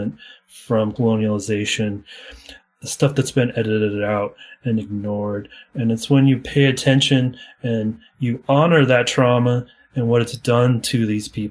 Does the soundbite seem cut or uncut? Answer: cut